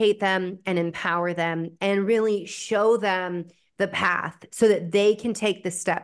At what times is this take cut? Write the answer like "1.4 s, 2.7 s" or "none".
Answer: none